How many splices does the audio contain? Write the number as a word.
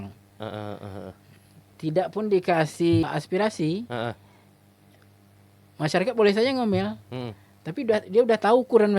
one